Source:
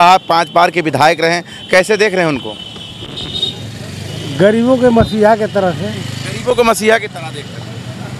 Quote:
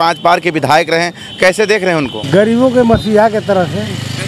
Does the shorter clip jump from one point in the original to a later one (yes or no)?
yes